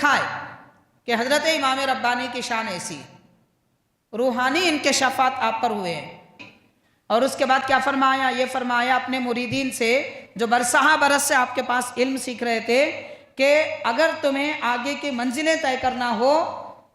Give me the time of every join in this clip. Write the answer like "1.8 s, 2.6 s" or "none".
6.4 s